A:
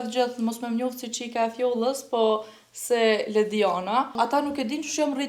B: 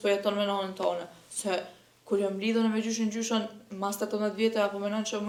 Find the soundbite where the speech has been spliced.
A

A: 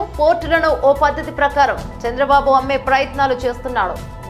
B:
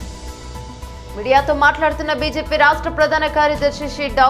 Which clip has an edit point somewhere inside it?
B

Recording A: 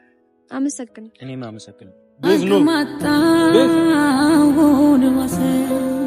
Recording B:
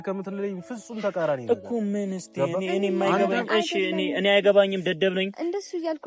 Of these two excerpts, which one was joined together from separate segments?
A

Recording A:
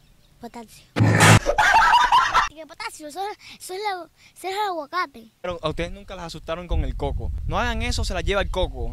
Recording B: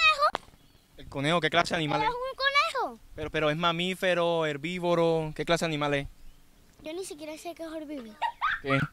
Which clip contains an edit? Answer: A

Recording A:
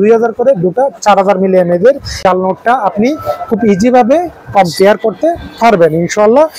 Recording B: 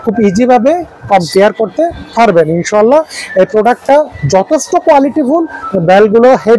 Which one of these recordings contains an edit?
A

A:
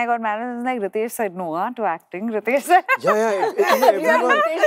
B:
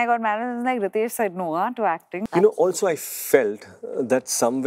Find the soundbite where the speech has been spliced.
B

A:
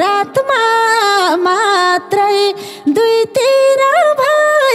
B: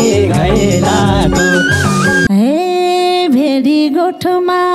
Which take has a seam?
B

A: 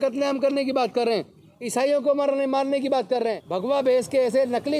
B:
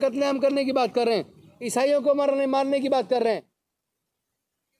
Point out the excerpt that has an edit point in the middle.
A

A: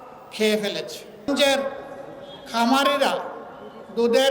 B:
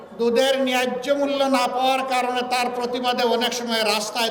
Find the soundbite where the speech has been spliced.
A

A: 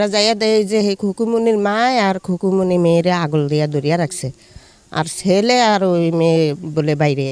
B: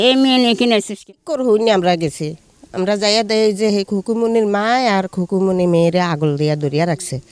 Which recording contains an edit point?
B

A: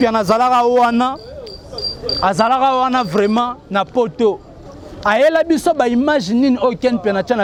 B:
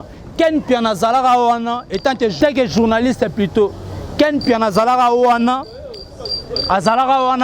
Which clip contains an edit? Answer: B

